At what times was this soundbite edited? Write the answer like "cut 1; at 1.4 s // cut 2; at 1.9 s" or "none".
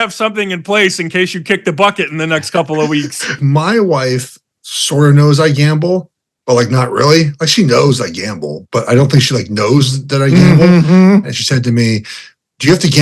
cut 1; at 3.4 s // cut 2; at 11.3 s